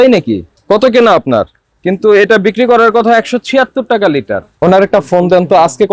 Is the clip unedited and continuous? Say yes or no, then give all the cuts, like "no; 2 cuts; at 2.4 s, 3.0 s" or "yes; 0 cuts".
no; 1 cut; at 4.5 s